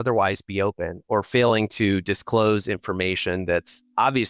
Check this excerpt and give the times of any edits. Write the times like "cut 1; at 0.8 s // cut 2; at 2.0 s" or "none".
none